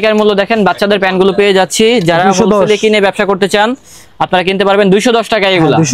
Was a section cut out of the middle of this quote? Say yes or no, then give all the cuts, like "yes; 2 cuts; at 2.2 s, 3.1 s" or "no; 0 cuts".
no; 0 cuts